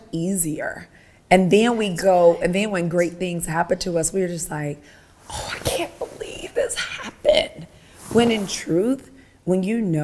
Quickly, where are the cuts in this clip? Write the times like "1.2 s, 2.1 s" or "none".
none